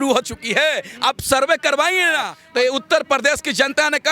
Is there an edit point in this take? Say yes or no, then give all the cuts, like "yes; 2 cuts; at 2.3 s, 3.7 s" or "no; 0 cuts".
yes; 1 cut; at 2.4 s